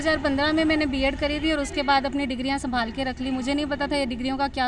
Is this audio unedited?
yes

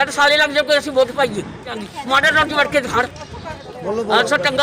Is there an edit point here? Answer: yes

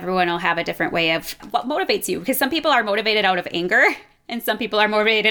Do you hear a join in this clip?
yes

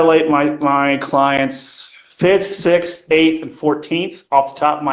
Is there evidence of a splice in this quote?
no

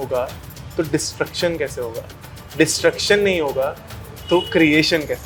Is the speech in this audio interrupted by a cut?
no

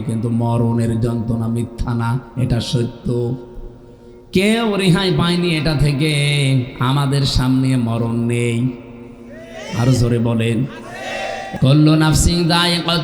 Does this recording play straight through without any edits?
no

